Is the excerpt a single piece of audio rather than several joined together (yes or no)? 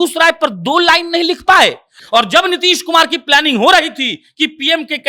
no